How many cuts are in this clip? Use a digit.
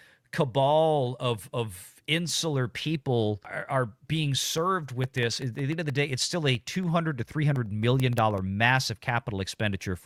0